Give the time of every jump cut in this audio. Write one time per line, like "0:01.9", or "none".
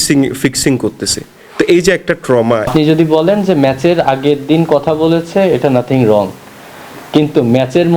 0:02.7